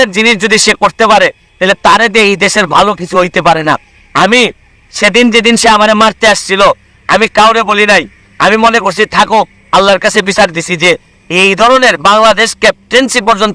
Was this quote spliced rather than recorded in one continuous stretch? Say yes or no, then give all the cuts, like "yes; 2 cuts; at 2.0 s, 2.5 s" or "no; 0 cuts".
no; 0 cuts